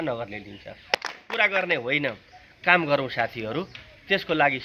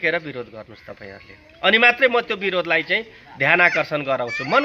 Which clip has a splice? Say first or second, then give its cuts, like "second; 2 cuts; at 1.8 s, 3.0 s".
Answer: first; 1 cut; at 0.9 s